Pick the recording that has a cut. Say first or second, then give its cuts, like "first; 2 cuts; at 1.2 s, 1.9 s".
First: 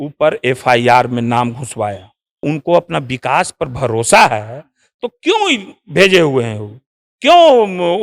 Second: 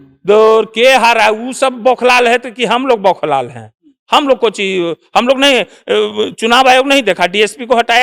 first; 1 cut; at 2.4 s